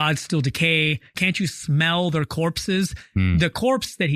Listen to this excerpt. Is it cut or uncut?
cut